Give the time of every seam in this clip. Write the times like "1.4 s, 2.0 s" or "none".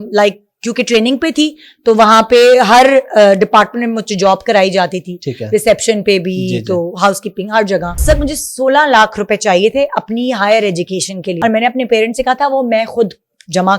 8.0 s, 11.4 s

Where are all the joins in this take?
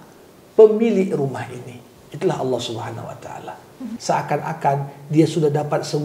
4.0 s

